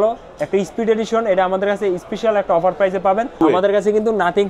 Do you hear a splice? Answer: yes; 1 cut; at 3.4 s

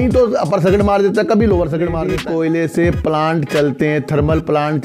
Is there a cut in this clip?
yes; 1 cut; at 2.1 s

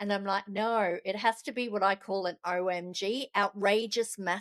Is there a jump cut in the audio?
no; 0 cuts

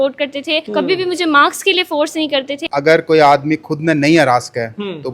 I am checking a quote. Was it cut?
yes; 1 cut; at 2.7 s

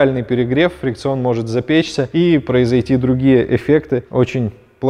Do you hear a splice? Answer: no; 0 cuts

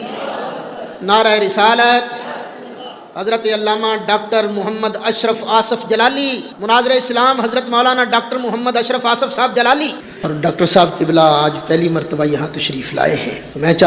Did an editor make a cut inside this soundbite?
no; 0 cuts

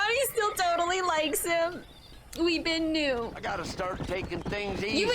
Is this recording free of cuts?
no; 1 cut; at 3.4 s

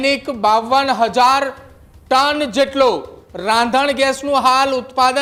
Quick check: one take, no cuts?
yes; 0 cuts

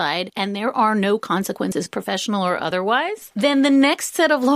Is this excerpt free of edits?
no; 1 cut; at 3.2 s

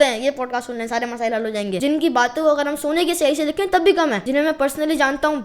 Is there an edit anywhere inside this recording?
yes; 2 cuts; at 1.8 s, 4.2 s

